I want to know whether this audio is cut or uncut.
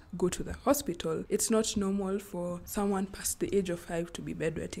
cut